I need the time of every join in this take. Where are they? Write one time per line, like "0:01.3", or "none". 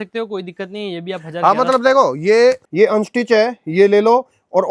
0:02.7